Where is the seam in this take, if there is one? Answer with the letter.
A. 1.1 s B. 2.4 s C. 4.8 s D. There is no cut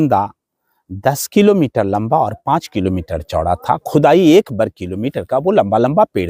D